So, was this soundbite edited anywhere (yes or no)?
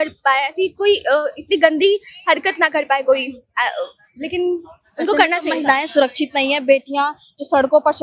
no